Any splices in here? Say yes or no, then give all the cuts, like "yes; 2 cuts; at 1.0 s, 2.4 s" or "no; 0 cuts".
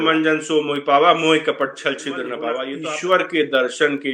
yes; 1 cut; at 2.7 s